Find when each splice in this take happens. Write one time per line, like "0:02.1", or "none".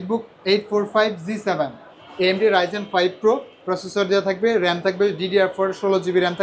none